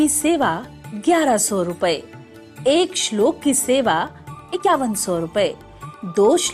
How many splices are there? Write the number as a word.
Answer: one